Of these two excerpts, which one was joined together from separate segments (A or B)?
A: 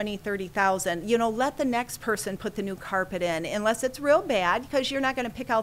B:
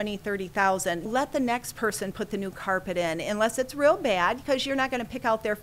B